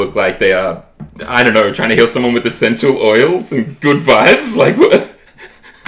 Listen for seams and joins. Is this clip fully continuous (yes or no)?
yes